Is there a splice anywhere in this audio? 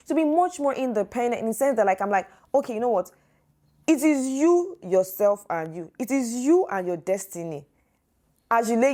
no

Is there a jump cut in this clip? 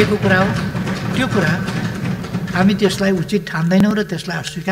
no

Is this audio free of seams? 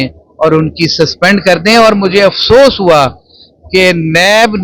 yes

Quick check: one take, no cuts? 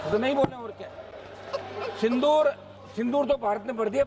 no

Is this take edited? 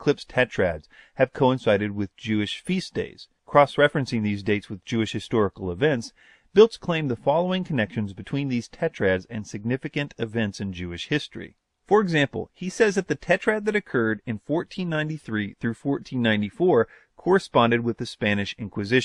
no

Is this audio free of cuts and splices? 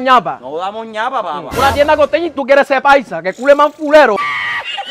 yes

